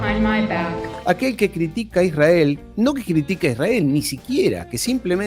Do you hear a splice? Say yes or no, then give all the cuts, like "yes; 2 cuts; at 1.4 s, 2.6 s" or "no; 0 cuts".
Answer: yes; 1 cut; at 0.9 s